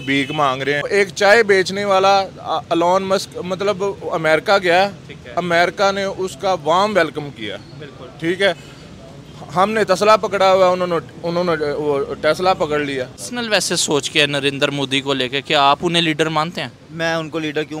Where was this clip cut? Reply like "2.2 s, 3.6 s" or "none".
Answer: 0.9 s, 13.2 s